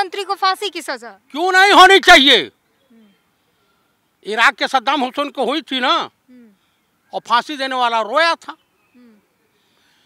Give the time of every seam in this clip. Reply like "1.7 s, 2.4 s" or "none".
none